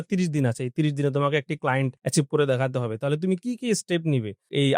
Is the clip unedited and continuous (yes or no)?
no